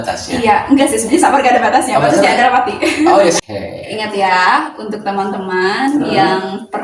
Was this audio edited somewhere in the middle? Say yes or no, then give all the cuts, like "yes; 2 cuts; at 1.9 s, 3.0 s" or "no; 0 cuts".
yes; 1 cut; at 3.4 s